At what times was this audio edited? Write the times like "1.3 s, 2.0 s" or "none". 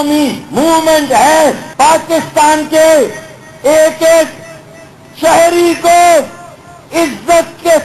1.6 s, 2.7 s